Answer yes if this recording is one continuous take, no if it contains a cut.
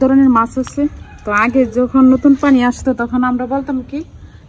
yes